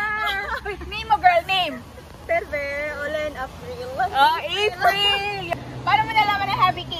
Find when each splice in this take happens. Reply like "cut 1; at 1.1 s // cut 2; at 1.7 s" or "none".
cut 1; at 5.5 s